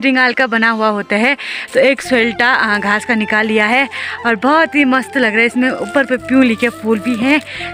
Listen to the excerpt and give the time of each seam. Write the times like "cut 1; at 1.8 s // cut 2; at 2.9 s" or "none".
none